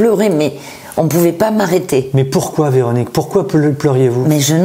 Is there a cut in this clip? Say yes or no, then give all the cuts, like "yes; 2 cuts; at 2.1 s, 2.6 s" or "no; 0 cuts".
no; 0 cuts